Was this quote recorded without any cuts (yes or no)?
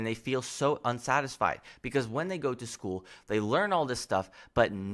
yes